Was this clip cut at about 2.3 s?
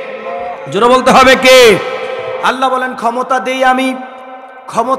yes; 1 cut; at 2.3 s

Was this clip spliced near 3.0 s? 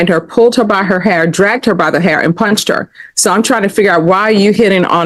no; 0 cuts

